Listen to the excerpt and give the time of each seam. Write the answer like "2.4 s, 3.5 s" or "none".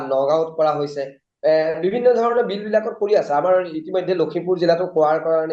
none